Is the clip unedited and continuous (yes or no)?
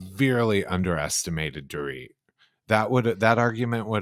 yes